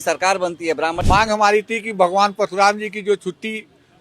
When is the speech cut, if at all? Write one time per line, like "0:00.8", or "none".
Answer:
0:01.0